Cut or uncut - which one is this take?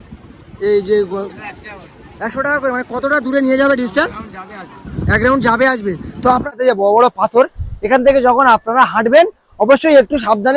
cut